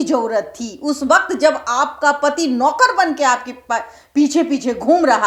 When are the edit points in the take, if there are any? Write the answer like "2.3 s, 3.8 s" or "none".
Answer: none